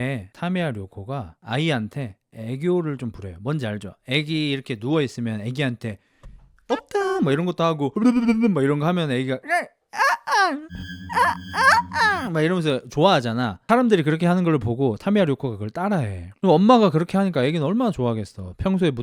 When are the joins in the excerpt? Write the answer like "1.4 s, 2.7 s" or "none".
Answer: none